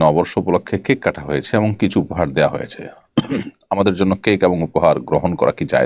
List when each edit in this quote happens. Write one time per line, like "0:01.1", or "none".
none